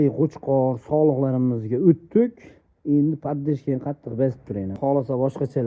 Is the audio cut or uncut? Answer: cut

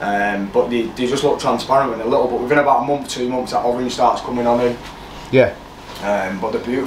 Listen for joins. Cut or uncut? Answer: uncut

